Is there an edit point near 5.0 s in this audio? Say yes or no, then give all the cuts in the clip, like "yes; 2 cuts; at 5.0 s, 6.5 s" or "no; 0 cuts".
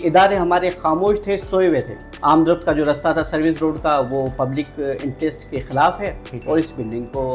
no; 1 cut; at 2.0 s